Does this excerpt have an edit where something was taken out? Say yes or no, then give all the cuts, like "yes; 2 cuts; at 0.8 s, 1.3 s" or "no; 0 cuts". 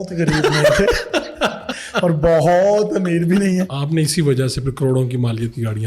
yes; 1 cut; at 3.8 s